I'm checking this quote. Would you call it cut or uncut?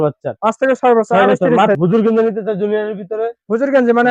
cut